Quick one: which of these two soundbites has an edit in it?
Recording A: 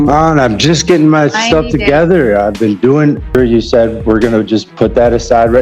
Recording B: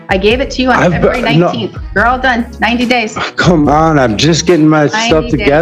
A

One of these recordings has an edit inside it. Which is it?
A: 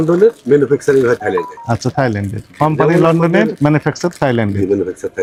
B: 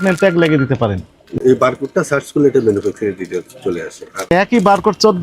B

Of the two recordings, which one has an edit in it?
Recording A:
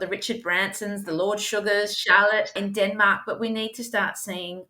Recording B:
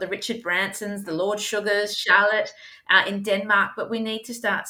A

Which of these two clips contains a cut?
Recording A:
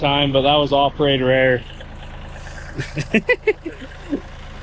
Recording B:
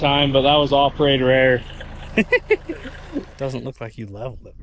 B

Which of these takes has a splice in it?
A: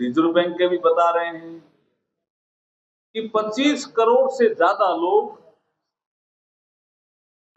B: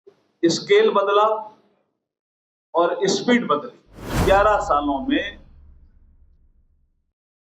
B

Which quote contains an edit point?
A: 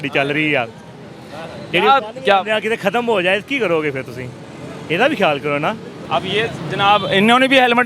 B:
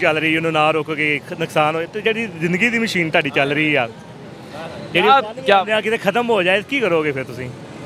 A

